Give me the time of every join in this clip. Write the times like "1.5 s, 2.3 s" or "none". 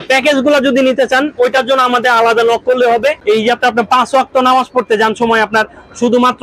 3.2 s